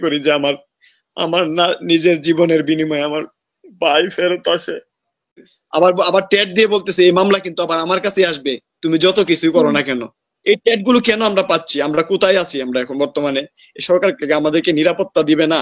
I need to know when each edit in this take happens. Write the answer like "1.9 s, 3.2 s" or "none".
5.6 s